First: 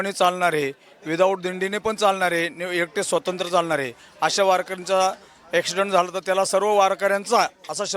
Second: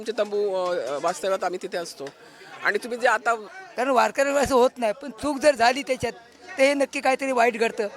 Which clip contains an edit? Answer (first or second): second